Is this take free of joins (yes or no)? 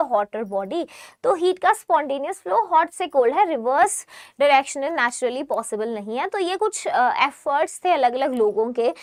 yes